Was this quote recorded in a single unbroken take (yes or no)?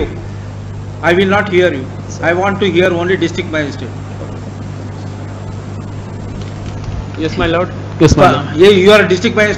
yes